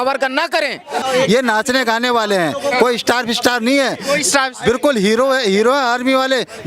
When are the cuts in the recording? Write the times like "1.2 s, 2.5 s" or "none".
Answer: 1.0 s